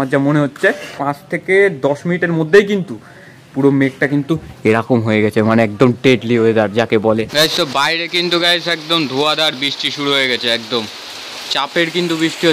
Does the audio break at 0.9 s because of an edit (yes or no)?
yes